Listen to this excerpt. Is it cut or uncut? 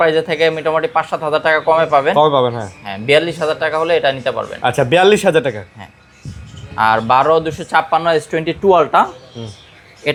uncut